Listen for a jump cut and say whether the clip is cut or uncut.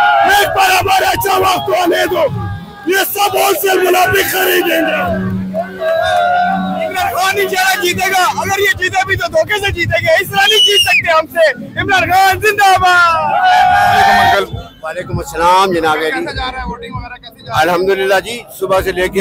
uncut